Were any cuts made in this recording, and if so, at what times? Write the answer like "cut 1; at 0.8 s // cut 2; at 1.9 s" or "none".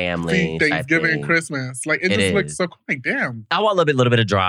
cut 1; at 3.4 s